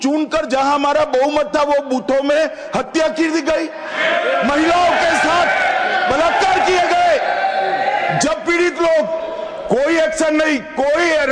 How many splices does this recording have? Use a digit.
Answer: 0